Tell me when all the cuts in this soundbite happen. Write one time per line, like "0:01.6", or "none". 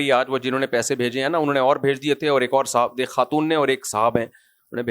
none